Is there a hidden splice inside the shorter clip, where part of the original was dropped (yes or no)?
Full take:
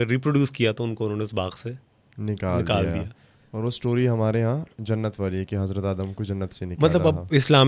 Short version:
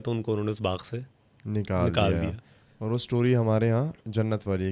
no